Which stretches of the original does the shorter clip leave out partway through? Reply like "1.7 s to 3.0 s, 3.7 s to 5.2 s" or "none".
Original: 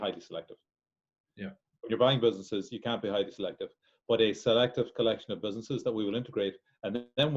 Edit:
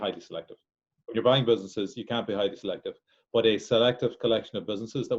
0.9 s to 1.7 s